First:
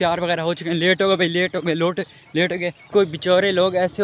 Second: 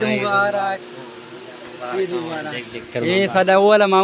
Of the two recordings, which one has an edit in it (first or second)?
first